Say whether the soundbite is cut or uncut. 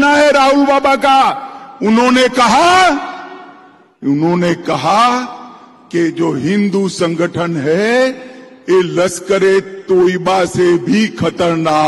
uncut